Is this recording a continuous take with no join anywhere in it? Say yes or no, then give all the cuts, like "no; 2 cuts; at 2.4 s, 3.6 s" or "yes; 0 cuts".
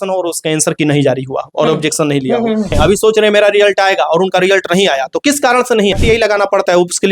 no; 2 cuts; at 2.8 s, 5.9 s